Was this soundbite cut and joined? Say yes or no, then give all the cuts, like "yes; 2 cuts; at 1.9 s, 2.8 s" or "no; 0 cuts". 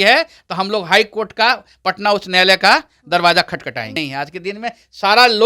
yes; 1 cut; at 4.0 s